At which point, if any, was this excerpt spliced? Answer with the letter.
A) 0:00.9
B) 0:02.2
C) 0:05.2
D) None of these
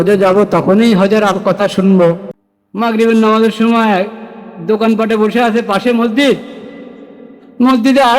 B